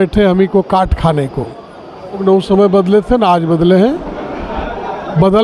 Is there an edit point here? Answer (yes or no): yes